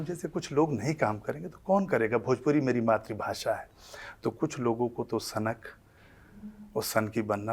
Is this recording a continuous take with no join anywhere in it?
yes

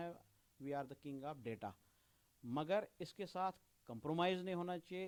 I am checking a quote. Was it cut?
no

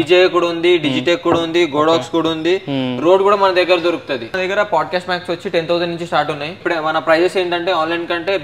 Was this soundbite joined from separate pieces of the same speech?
yes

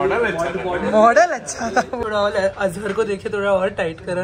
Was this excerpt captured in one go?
no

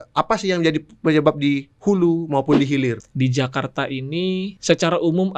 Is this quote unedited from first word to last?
no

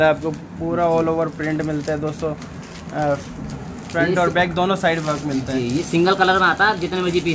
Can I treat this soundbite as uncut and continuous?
yes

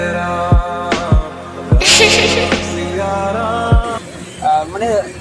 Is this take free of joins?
yes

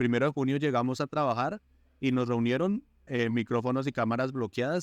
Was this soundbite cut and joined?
yes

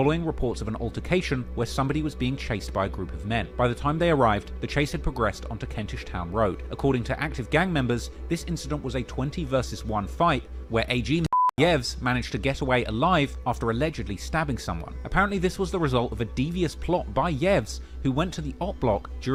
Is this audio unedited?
yes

